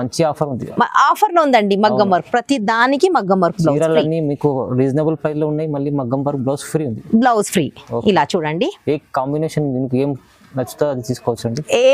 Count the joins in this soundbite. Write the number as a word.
zero